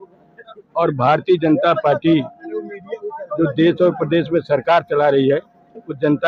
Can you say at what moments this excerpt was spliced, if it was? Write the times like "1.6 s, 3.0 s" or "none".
none